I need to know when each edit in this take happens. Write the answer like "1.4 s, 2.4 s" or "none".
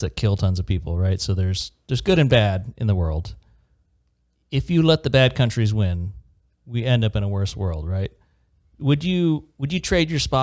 none